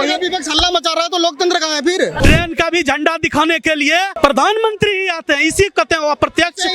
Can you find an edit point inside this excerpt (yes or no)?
yes